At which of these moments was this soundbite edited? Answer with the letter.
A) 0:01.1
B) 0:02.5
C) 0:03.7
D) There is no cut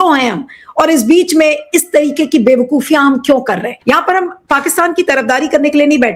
C